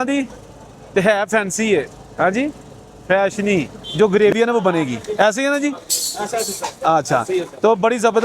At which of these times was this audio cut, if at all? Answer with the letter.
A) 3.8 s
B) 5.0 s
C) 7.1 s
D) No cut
A